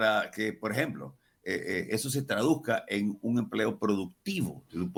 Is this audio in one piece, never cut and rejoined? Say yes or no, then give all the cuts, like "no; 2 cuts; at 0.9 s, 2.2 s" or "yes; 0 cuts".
yes; 0 cuts